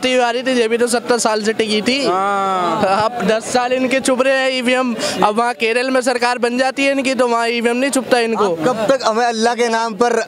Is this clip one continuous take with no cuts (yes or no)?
yes